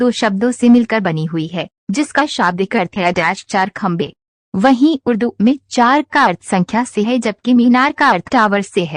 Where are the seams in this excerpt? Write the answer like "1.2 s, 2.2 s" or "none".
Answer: none